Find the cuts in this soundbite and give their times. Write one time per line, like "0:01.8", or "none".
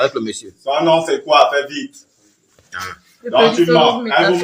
none